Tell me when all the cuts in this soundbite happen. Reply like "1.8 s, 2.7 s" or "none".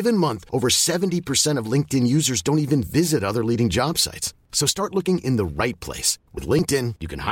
none